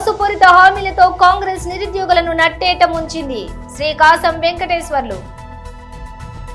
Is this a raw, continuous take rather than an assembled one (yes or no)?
yes